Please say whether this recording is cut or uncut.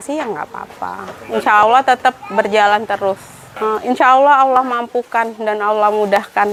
uncut